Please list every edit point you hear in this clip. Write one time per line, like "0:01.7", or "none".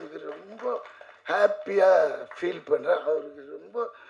none